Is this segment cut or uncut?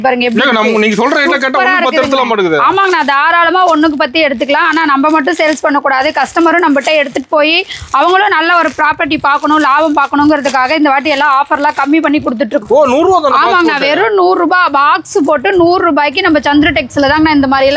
cut